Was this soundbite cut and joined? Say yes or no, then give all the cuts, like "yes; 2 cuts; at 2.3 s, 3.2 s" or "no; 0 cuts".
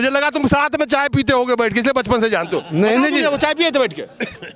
no; 0 cuts